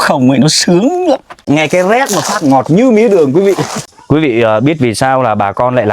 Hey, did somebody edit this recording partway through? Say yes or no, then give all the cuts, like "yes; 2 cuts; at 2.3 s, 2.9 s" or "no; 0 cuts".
yes; 2 cuts; at 1.3 s, 3.7 s